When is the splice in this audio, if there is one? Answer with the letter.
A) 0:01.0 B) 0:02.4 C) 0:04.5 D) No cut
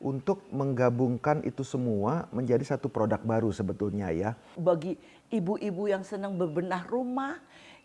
C